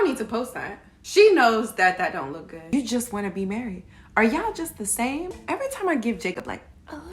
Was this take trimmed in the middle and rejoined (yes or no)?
yes